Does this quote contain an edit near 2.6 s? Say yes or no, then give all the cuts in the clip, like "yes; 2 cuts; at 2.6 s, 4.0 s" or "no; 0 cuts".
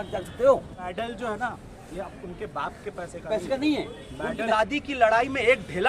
no; 2 cuts; at 0.9 s, 4.5 s